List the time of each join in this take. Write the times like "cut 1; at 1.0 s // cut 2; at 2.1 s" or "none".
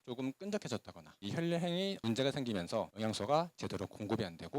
cut 1; at 1.2 s

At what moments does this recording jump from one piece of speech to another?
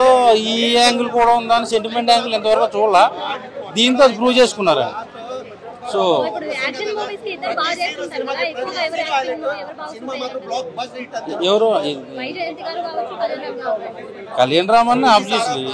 none

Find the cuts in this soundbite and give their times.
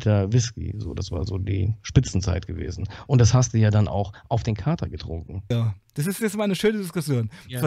cut 1; at 5.5 s

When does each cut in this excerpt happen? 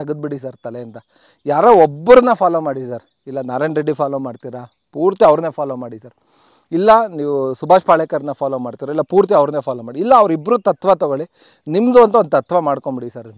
none

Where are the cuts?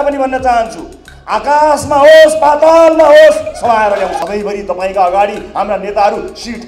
cut 1; at 4.2 s

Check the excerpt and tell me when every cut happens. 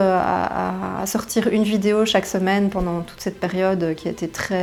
none

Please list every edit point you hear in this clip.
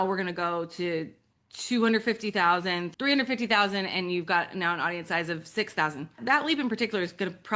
cut 1; at 2.9 s // cut 2; at 6.2 s

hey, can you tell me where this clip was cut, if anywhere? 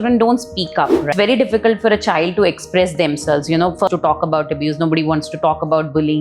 cut 1; at 1.0 s // cut 2; at 3.9 s

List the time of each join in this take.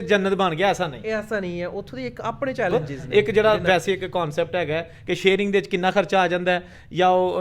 cut 1; at 2.7 s

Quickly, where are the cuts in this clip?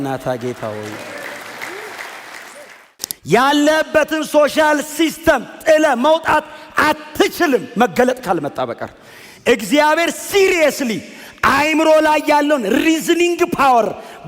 cut 1; at 2.6 s

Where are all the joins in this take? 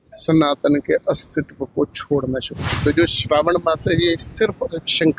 cut 1; at 2.7 s

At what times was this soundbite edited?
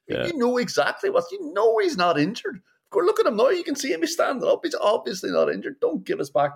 none

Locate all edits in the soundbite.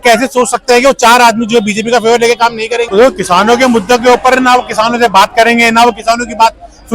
cut 1; at 2.9 s

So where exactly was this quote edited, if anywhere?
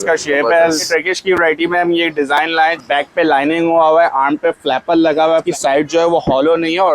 cut 1; at 0.9 s // cut 2; at 2.8 s // cut 3; at 5.5 s

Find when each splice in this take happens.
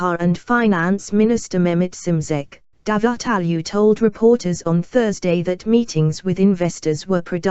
cut 1; at 4.0 s

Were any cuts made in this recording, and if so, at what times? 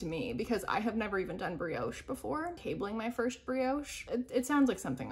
cut 1; at 2.6 s // cut 2; at 3.9 s

